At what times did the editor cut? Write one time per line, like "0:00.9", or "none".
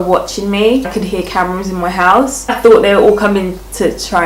0:00.9
0:02.5